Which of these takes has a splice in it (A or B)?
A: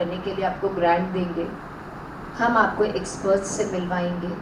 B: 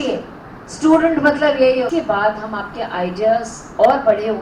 B